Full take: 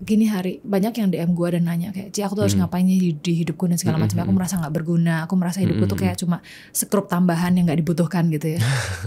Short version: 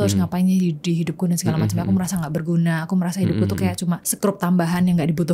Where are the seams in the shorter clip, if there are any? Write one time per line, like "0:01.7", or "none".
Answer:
0:04.1